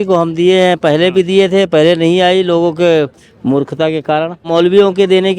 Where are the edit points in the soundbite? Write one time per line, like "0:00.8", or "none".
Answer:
0:04.5

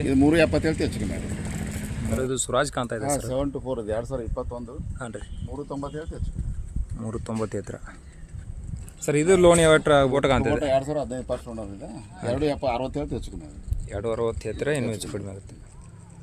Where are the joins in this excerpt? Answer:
0:02.2
0:10.1

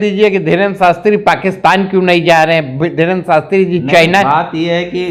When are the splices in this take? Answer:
none

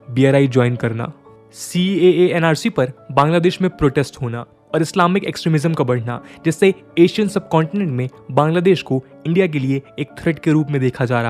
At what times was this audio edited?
none

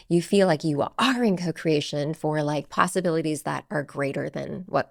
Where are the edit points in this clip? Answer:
none

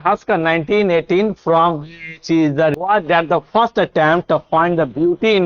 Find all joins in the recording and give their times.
0:02.7

